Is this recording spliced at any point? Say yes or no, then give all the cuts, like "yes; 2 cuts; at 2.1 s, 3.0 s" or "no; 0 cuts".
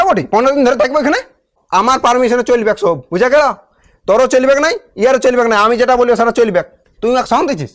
yes; 2 cuts; at 1.6 s, 6.8 s